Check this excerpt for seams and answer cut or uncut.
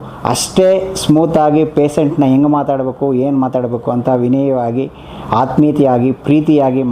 uncut